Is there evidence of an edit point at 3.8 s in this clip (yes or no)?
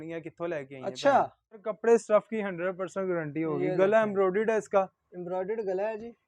no